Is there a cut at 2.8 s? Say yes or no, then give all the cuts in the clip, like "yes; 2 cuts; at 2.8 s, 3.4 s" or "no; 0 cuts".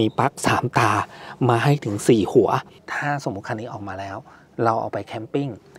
yes; 1 cut; at 2.8 s